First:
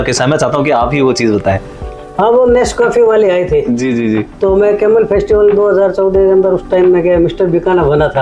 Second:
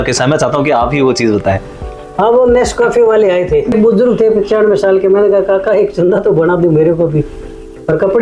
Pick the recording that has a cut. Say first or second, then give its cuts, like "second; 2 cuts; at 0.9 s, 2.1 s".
second; 1 cut; at 3.7 s